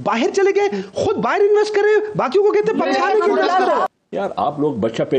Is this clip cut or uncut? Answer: cut